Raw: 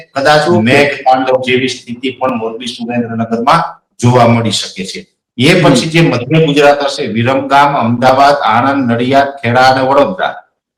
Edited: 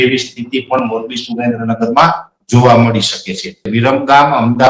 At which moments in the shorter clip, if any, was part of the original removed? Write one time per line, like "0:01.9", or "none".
0:03.6